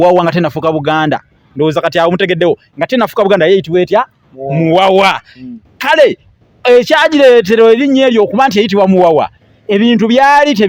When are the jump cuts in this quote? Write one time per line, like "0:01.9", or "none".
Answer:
none